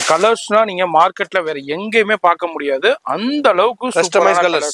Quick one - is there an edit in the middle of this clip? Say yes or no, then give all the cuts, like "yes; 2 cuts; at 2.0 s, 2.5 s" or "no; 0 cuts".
no; 0 cuts